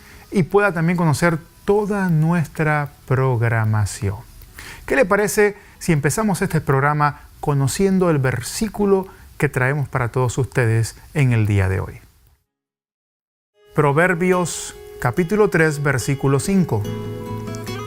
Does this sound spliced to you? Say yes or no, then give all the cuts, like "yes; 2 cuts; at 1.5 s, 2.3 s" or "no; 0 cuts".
no; 0 cuts